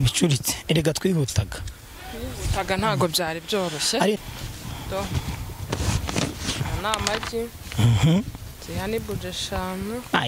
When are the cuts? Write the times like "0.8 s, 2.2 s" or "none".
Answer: 4.2 s